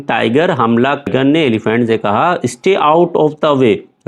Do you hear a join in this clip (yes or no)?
yes